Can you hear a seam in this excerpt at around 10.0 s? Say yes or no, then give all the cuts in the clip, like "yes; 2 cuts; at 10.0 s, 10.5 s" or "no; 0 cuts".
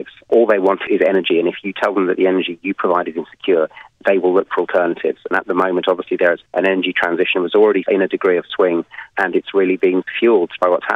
yes; 2 cuts; at 6.4 s, 10.0 s